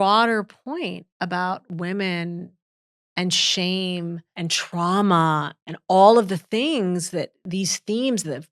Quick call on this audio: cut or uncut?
cut